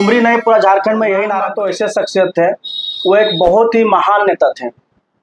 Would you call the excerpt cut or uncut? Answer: cut